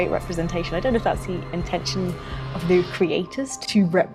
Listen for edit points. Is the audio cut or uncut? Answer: uncut